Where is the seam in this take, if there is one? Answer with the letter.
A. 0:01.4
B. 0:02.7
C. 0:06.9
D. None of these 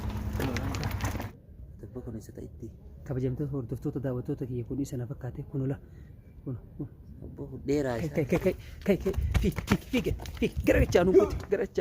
A